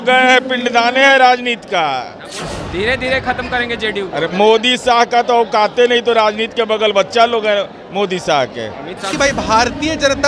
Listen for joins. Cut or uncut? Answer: cut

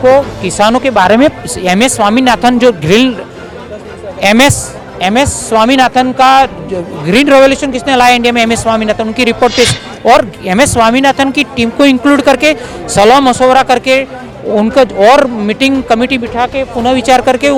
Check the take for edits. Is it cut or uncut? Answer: uncut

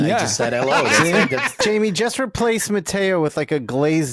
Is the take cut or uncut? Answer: cut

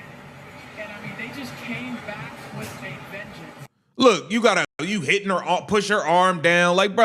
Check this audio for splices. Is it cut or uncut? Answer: uncut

